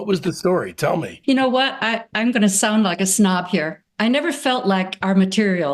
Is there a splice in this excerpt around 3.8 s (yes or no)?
yes